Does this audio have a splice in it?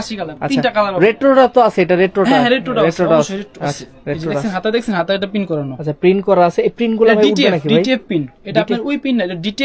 no; 0 cuts

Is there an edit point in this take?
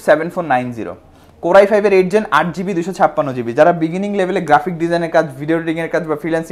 no; 0 cuts

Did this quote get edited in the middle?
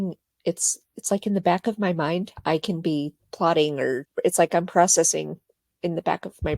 yes; 2 cuts; at 3.2 s, 4.0 s

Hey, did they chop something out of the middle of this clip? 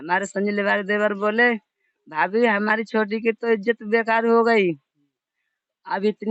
no; 0 cuts

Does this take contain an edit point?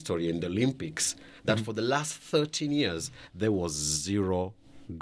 no; 0 cuts

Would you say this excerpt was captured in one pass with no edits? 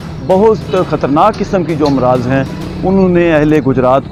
yes; 0 cuts

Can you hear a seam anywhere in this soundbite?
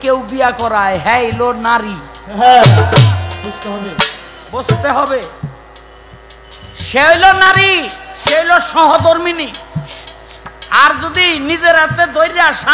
no; 0 cuts

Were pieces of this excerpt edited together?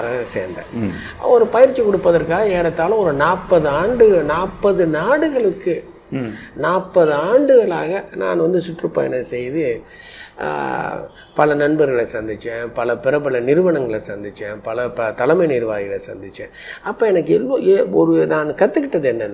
no; 0 cuts

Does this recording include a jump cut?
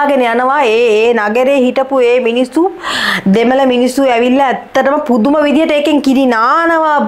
no; 0 cuts

